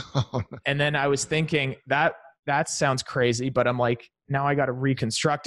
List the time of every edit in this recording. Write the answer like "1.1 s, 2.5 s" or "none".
none